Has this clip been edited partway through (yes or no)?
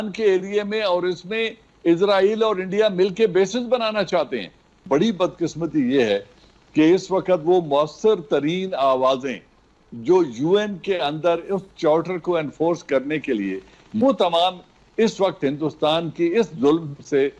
yes